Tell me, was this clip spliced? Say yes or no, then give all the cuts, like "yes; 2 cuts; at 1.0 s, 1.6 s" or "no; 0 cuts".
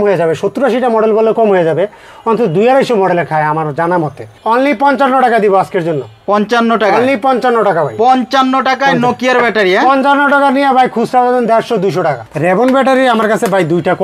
yes; 2 cuts; at 4.3 s, 12.3 s